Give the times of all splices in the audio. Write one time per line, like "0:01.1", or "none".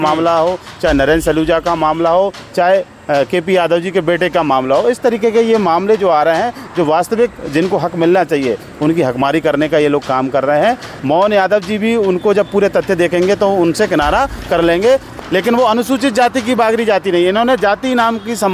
0:10.9
0:15.1